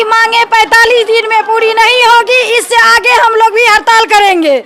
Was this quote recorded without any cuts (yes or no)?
yes